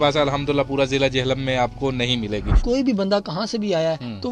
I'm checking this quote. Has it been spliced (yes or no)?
yes